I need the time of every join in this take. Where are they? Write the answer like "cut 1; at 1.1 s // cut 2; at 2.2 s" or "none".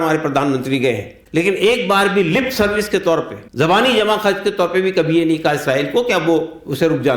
cut 1; at 1.1 s // cut 2; at 3.4 s

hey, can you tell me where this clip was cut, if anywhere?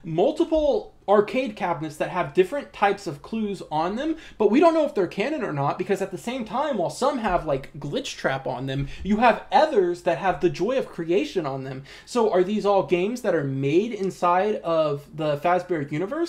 cut 1; at 0.9 s

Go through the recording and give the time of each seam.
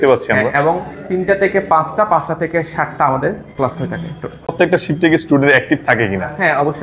none

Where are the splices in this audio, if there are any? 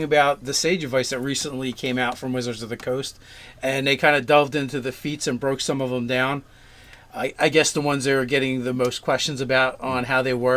cut 1; at 5.6 s

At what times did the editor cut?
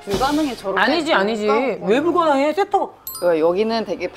cut 1; at 3.0 s

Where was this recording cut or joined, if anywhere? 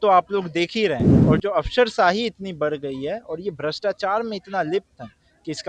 cut 1; at 1.1 s

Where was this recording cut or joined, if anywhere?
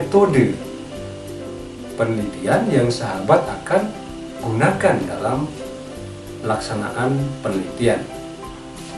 cut 1; at 8.1 s

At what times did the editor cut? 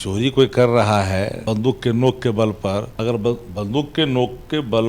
cut 1; at 1.4 s // cut 2; at 2.9 s

